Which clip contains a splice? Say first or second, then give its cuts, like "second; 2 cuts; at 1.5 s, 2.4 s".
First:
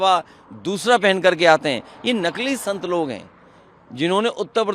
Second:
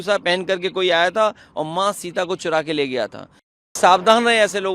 second; 1 cut; at 3.7 s